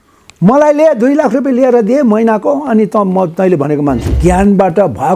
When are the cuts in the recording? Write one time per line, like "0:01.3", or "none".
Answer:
0:04.1